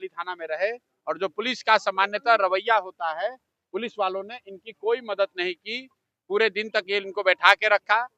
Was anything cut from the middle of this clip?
no; 0 cuts

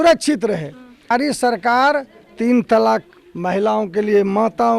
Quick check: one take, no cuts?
no; 1 cut; at 1.1 s

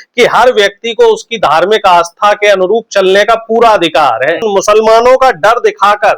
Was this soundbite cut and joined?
yes; 1 cut; at 4.5 s

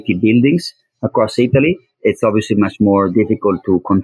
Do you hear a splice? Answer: yes; 1 cut; at 1.9 s

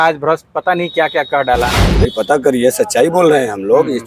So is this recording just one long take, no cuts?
no; 1 cut; at 1.8 s

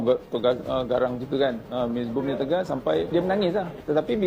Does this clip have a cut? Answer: no; 0 cuts

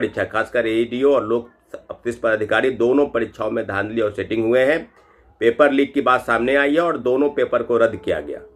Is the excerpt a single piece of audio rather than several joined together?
yes; 0 cuts

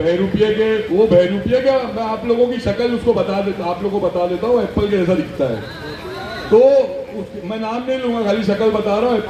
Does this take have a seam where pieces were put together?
no; 0 cuts

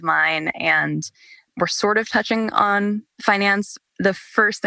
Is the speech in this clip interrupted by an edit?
yes; 1 cut; at 3.5 s

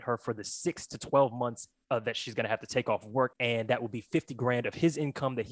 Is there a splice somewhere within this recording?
yes; 1 cut; at 3.3 s

